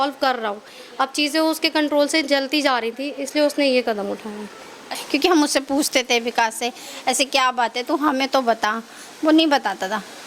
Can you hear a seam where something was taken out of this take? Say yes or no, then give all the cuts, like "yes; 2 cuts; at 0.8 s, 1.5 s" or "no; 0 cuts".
yes; 1 cut; at 4.9 s